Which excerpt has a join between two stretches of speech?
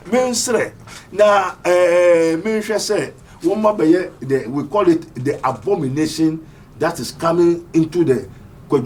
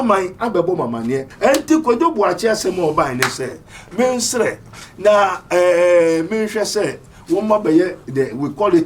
second; 1 cut; at 1.3 s

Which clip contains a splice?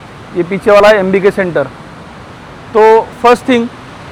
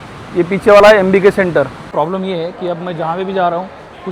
second; 1 cut; at 1.8 s

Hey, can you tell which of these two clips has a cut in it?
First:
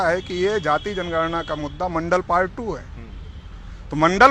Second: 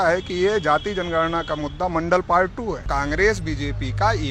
second; 1 cut; at 2.8 s

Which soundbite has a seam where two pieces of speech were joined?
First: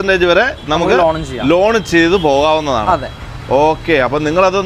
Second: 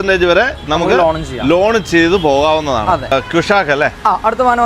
second; 1 cut; at 3.1 s

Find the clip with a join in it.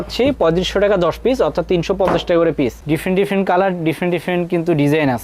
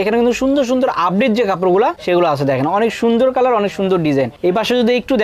first; 1 cut; at 2.8 s

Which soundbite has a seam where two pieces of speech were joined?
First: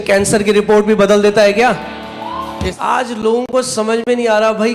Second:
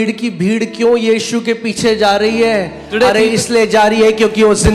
first; 1 cut; at 2.7 s

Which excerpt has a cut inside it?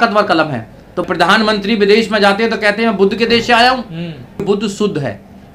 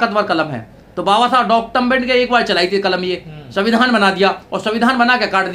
first; 2 cuts; at 1.0 s, 4.4 s

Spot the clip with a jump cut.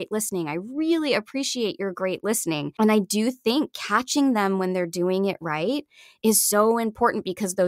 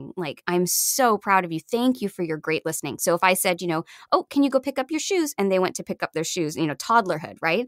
first; 1 cut; at 2.7 s

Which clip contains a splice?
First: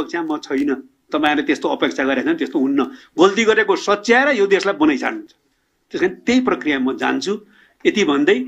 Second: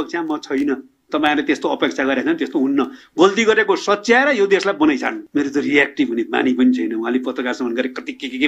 second; 1 cut; at 5.2 s

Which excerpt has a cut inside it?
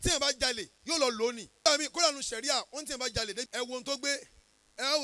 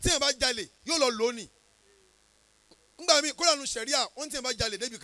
first; 2 cuts; at 1.5 s, 3.5 s

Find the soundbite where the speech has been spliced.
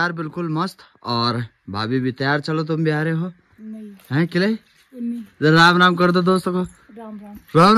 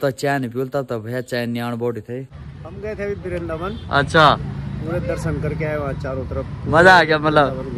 second; 1 cut; at 2.4 s

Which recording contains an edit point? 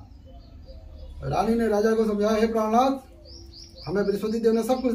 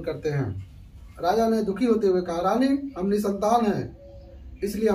second; 1 cut; at 1.1 s

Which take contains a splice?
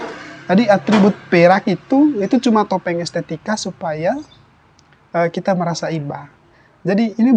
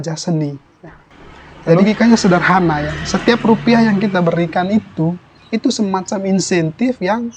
second; 1 cut; at 1.8 s

